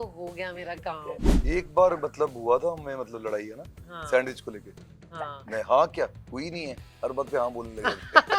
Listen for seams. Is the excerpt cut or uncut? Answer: cut